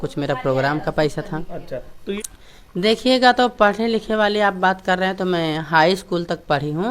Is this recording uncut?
no; 1 cut; at 2.2 s

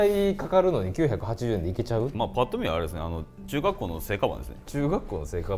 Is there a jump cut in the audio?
no; 0 cuts

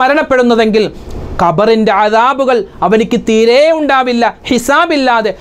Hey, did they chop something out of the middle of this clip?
no; 0 cuts

